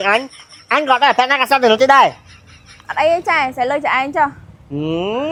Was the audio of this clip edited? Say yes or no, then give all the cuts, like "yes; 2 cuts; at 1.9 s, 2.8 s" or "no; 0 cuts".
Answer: no; 0 cuts